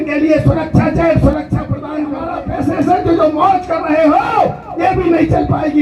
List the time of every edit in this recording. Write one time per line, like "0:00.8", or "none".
0:02.3

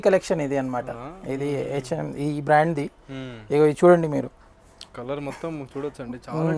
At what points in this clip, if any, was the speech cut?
none

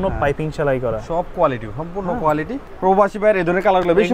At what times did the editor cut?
0:02.6

